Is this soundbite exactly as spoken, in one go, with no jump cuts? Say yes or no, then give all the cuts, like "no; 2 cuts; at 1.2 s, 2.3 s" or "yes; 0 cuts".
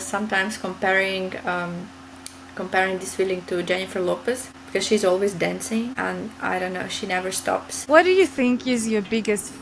no; 3 cuts; at 4.5 s, 5.9 s, 7.7 s